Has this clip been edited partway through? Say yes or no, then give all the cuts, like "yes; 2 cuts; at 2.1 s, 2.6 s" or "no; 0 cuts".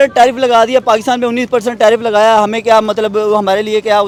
no; 0 cuts